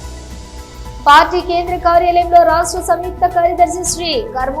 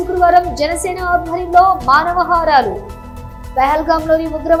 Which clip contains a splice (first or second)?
first